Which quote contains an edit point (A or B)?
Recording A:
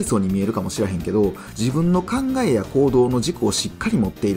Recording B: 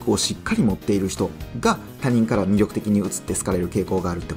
A